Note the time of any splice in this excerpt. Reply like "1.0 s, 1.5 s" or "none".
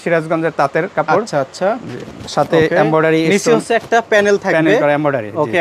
none